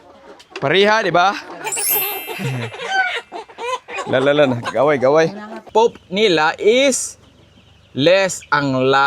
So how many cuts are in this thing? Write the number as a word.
one